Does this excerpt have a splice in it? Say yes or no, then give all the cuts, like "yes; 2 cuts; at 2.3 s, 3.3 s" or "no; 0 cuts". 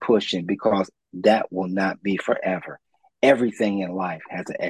no; 0 cuts